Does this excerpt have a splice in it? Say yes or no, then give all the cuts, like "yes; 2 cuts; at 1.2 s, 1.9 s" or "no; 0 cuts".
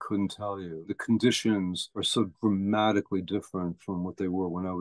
yes; 1 cut; at 0.9 s